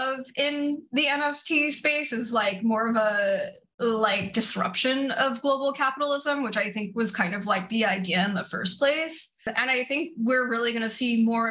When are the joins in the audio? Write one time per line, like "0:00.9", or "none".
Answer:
0:09.5